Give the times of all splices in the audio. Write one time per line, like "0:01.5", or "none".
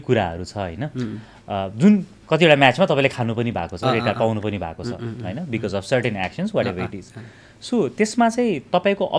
none